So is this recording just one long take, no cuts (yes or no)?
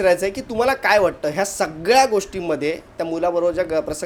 yes